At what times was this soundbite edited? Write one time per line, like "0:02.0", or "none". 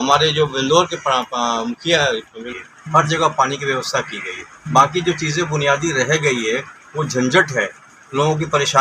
0:02.4